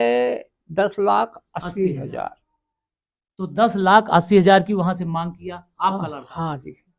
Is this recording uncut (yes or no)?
yes